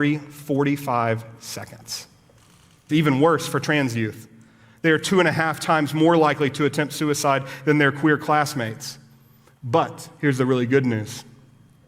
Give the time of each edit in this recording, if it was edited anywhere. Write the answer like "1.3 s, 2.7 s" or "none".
2.8 s